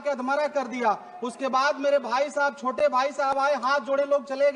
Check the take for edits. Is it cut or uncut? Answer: uncut